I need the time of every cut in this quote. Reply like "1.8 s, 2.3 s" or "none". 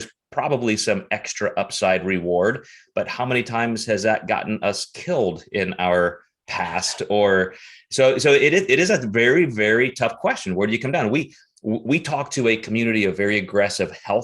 none